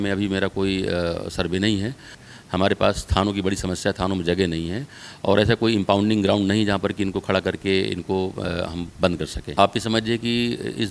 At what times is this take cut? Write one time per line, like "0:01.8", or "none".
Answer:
0:02.1
0:09.4